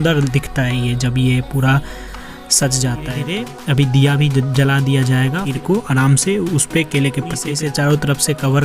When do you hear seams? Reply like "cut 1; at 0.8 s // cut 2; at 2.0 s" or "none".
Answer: cut 1; at 3.3 s // cut 2; at 5.4 s // cut 3; at 7.5 s